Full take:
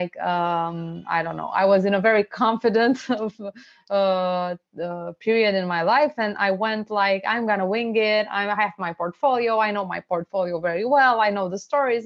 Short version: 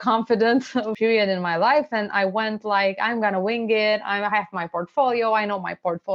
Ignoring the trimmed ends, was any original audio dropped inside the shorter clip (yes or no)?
yes